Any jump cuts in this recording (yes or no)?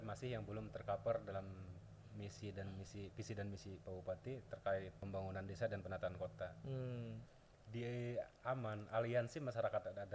yes